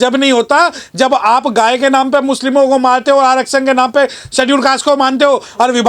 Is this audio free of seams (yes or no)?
yes